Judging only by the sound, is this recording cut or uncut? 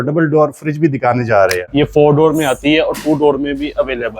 cut